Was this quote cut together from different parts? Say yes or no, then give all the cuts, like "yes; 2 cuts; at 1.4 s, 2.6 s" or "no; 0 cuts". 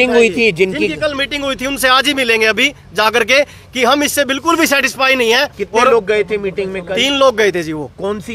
no; 0 cuts